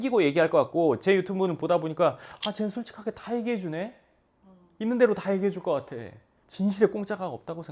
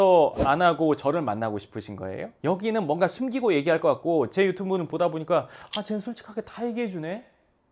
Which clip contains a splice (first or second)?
second